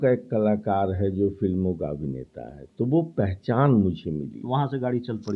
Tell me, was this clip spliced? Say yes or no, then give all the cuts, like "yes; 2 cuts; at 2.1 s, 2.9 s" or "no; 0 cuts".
no; 0 cuts